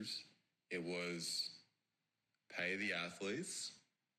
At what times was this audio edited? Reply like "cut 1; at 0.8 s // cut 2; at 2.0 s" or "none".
none